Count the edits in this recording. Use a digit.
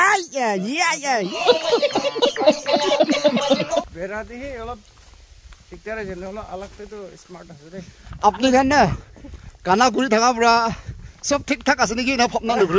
3